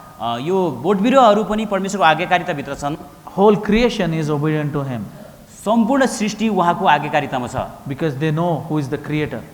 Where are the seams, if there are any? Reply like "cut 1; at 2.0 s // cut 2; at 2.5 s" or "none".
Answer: cut 1; at 3.2 s